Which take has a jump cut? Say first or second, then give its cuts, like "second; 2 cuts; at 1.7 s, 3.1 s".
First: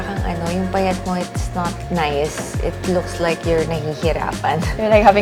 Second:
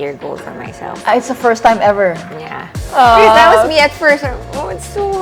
second; 1 cut; at 2.8 s